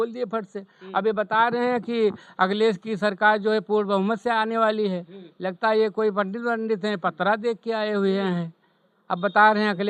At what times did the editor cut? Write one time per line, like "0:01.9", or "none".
none